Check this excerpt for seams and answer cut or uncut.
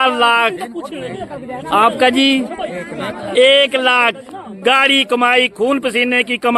uncut